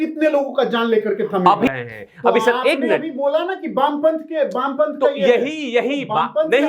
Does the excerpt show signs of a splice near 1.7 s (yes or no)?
yes